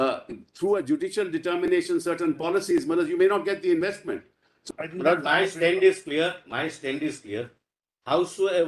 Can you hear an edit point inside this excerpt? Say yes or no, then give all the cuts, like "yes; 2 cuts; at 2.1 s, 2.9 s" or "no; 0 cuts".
yes; 1 cut; at 4.6 s